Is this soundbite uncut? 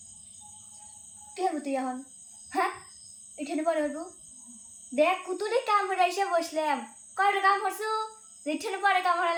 yes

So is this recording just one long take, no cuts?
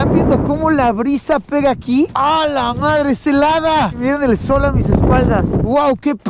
no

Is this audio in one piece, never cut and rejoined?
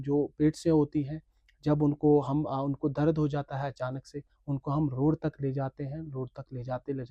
yes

